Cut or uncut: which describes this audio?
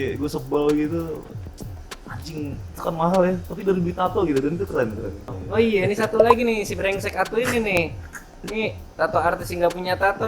cut